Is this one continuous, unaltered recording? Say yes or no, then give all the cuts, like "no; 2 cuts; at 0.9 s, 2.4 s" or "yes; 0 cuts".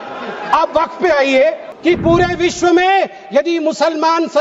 no; 1 cut; at 1.7 s